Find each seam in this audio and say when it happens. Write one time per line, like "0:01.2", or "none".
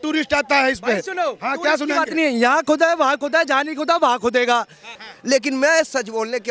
0:04.9